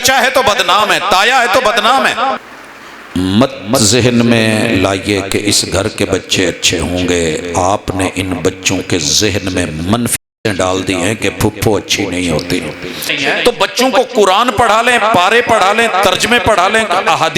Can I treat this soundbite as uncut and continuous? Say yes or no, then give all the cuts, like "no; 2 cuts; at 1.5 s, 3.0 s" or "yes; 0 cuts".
no; 2 cuts; at 2.4 s, 13.1 s